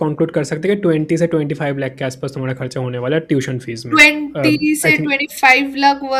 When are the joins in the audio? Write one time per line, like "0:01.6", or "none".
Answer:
none